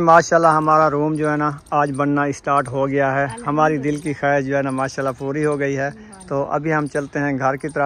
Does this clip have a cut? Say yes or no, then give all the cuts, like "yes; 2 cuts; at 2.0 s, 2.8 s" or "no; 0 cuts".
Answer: no; 0 cuts